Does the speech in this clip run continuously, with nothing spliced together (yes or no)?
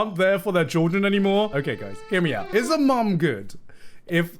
no